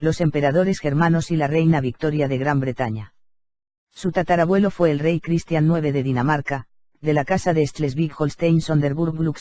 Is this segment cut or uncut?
cut